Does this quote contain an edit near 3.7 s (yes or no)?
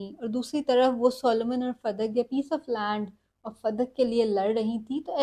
no